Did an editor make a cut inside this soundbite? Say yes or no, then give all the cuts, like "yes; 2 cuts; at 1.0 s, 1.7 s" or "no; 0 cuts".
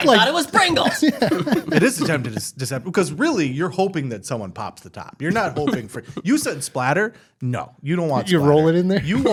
no; 0 cuts